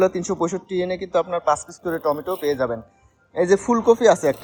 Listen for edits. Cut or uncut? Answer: uncut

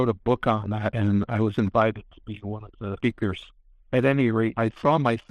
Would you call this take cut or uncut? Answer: cut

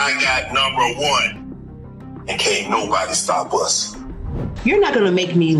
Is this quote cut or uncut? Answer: cut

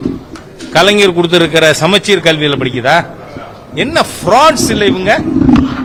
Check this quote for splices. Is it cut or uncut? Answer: uncut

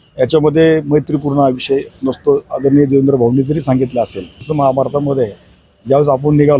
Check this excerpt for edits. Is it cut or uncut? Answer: cut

